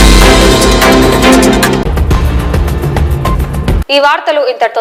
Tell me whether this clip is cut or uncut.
uncut